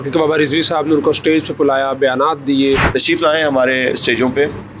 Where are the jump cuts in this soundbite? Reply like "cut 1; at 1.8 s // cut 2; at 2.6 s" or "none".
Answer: cut 1; at 2.9 s

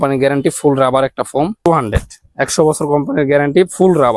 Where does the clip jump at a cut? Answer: cut 1; at 1.7 s

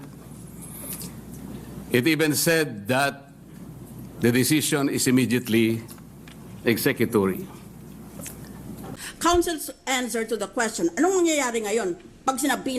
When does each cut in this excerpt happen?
cut 1; at 8.9 s

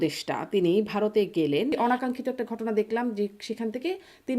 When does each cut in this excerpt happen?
cut 1; at 1.7 s

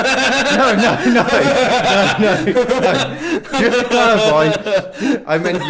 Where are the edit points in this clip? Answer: cut 1; at 2.9 s

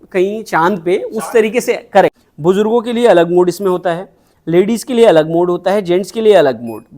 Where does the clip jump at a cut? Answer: cut 1; at 2.3 s

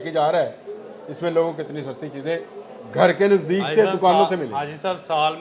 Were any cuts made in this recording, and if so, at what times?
none

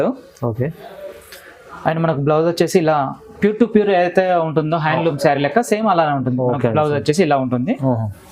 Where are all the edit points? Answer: none

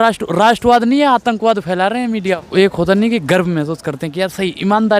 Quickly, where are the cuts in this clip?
cut 1; at 2.4 s

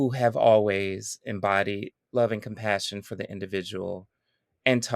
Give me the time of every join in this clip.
cut 1; at 1.9 s

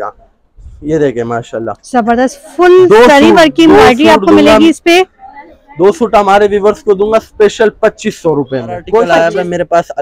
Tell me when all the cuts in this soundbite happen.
cut 1; at 9.1 s

